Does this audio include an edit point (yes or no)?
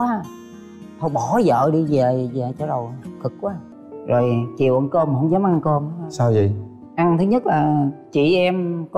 yes